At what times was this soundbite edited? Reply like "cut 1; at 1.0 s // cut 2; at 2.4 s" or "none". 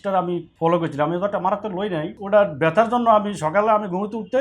cut 1; at 2.1 s